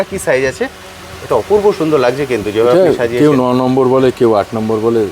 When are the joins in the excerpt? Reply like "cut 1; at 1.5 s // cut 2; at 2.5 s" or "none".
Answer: none